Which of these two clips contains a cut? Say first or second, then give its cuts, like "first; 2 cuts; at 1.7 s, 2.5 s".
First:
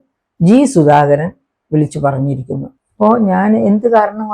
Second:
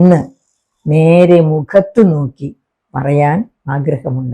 first; 1 cut; at 2.7 s